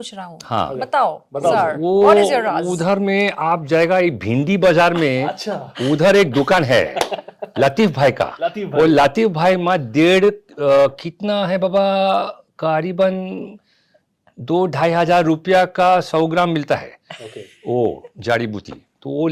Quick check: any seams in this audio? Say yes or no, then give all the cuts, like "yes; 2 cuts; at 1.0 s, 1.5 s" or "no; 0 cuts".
no; 0 cuts